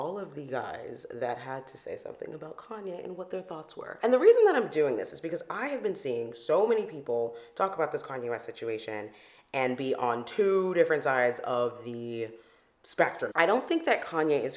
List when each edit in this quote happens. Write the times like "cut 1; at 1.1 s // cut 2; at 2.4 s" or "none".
cut 1; at 13.3 s